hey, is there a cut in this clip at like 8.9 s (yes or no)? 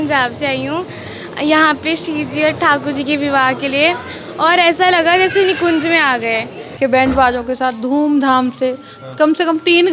no